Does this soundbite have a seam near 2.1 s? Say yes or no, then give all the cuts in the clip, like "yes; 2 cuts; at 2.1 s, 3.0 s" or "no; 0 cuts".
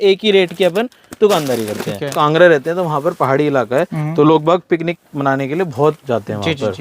yes; 1 cut; at 2.1 s